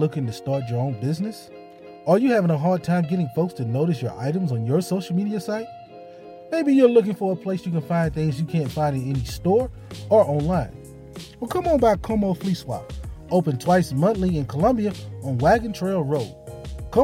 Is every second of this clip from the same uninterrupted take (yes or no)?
yes